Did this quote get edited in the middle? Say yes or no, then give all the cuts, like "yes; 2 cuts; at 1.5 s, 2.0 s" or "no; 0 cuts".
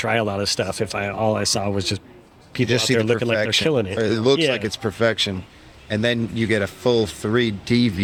no; 0 cuts